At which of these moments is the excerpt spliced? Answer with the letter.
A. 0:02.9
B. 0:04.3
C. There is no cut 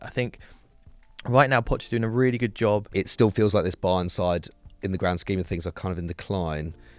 A